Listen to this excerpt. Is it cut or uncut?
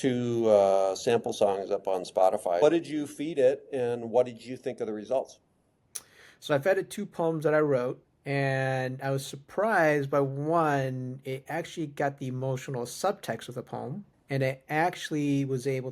cut